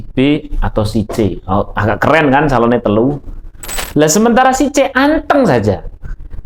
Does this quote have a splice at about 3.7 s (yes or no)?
yes